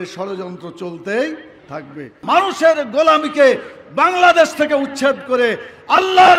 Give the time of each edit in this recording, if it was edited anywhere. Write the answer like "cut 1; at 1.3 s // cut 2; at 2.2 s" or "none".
cut 1; at 2.1 s